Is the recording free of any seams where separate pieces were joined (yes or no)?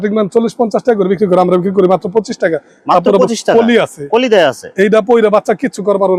yes